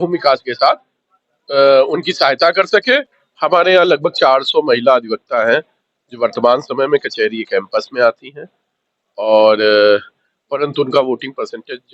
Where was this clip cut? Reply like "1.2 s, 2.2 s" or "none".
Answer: 3.2 s